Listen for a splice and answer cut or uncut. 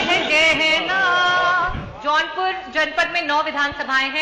cut